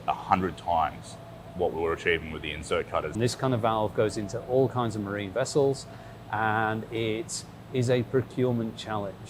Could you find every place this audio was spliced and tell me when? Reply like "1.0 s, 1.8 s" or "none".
3.1 s